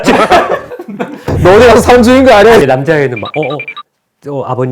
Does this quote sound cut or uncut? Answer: cut